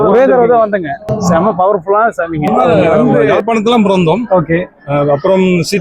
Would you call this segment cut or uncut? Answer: cut